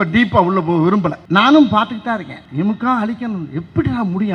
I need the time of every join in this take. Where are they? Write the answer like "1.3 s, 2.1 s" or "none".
1.2 s, 2.4 s